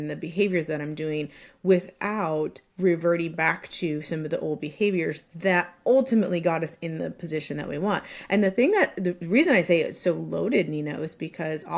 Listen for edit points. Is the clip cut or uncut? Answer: uncut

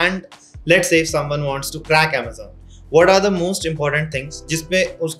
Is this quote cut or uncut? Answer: uncut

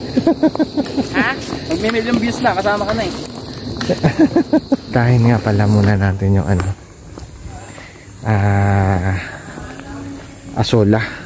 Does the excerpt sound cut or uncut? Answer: cut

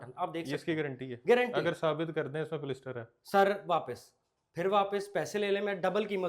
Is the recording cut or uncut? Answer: uncut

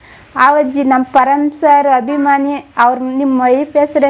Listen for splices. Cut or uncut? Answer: uncut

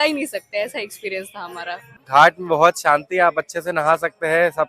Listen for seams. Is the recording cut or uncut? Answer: cut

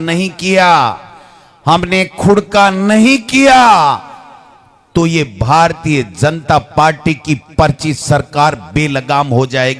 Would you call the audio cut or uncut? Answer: uncut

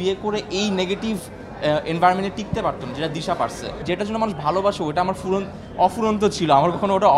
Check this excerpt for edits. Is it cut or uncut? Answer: cut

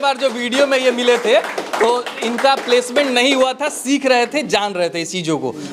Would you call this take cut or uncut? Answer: uncut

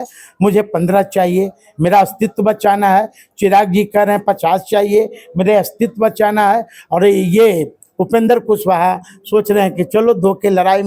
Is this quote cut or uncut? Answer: uncut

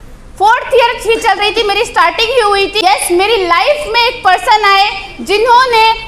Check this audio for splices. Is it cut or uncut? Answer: cut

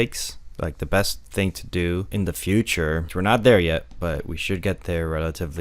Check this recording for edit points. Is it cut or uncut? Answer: cut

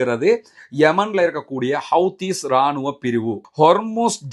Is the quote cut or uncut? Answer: cut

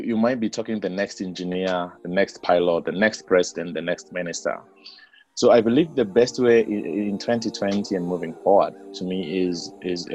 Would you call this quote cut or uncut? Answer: uncut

